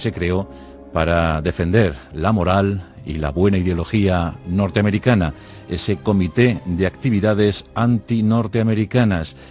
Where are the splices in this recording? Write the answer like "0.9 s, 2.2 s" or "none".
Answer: 4.0 s